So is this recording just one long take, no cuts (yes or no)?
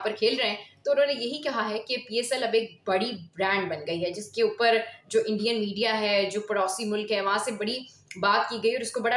yes